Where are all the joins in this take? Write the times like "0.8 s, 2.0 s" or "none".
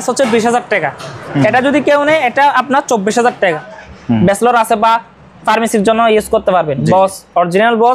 1.2 s, 3.7 s